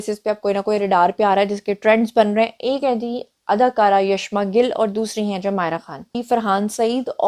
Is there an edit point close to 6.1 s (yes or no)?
yes